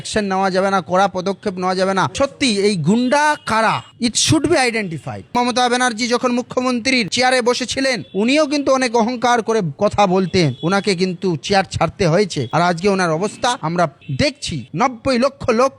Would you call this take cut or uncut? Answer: cut